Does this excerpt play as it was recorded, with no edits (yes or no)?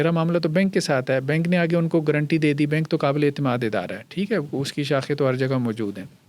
yes